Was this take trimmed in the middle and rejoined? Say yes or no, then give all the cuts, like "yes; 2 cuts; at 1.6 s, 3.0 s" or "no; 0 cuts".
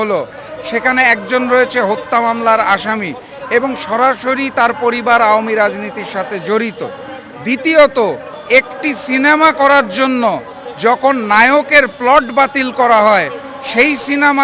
yes; 1 cut; at 8.3 s